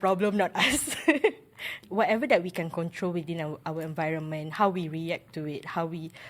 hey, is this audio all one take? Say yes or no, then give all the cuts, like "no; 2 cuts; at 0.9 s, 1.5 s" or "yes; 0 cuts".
no; 1 cut; at 1.8 s